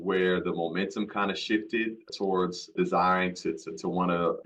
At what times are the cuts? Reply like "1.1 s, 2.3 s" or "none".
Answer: none